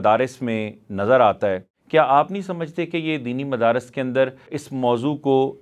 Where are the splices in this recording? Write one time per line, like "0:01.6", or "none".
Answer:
0:01.7
0:04.5